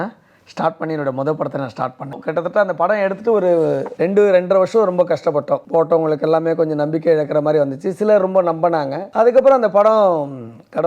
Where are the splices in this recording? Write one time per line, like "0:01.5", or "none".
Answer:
0:02.2
0:03.9
0:05.6
0:09.0